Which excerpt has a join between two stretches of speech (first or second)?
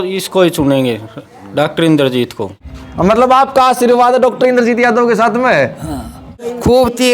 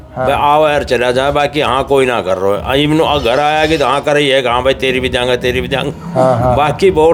first